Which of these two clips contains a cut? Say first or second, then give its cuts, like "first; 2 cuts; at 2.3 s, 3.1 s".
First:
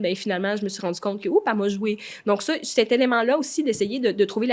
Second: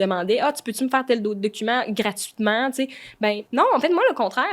second; 1 cut; at 3.4 s